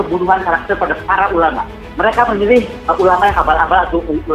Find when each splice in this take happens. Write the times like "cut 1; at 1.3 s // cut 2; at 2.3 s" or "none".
cut 1; at 1.8 s